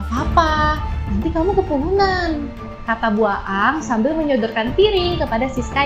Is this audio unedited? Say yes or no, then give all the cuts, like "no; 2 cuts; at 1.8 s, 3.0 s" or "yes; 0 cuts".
yes; 0 cuts